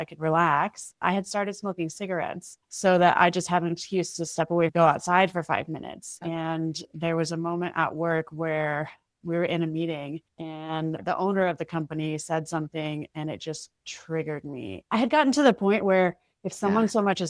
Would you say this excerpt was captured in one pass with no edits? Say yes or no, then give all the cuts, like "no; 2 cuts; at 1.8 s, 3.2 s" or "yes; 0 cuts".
no; 4 cuts; at 1.0 s, 4.7 s, 6.2 s, 14.8 s